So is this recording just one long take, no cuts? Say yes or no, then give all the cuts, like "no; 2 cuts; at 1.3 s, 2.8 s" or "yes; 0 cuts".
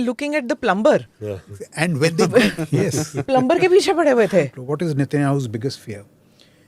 no; 1 cut; at 4.5 s